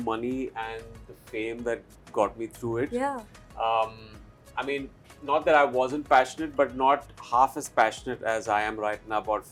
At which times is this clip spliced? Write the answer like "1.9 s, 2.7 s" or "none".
none